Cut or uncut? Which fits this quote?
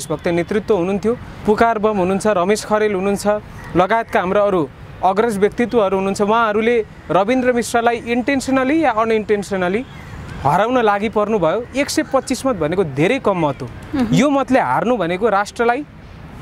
cut